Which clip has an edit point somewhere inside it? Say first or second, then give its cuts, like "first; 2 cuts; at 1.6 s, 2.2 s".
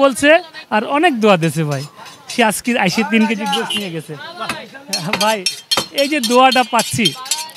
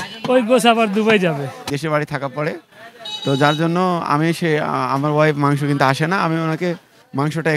second; 1 cut; at 1.7 s